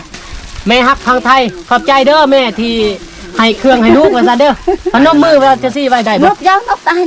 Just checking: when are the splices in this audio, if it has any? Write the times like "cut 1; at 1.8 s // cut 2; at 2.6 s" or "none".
none

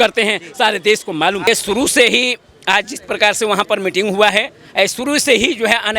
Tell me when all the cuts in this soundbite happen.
none

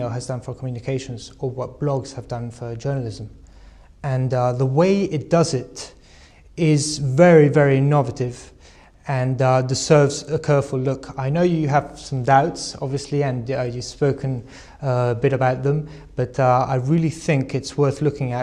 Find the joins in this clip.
cut 1; at 1.5 s

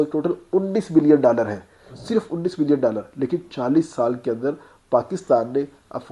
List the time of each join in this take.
none

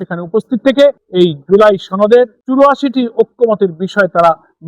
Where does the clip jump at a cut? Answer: cut 1; at 1.0 s // cut 2; at 2.4 s

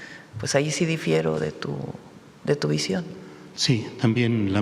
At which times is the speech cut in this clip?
none

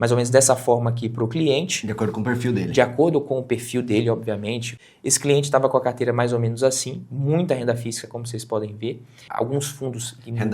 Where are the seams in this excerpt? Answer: cut 1; at 4.7 s // cut 2; at 9.1 s

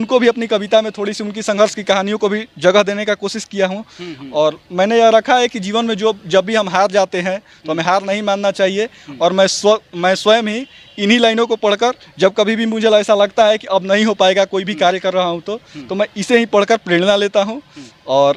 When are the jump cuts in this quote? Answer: none

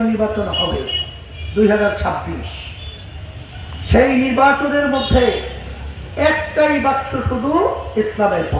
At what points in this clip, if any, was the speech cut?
none

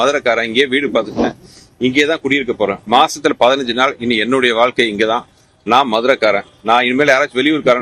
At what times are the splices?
none

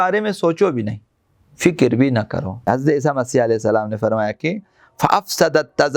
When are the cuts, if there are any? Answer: cut 1; at 2.7 s

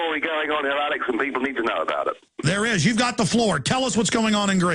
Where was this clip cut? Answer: cut 1; at 1.4 s

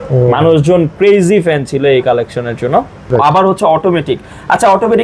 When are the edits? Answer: cut 1; at 3.0 s

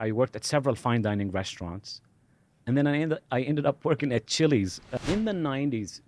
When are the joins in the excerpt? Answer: cut 1; at 4.8 s

